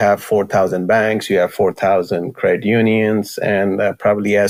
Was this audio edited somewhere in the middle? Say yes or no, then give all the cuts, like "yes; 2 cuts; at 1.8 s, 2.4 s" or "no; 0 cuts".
no; 0 cuts